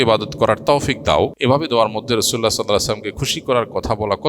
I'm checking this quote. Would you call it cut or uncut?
cut